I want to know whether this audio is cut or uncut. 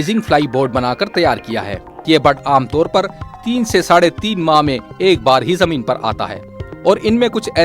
cut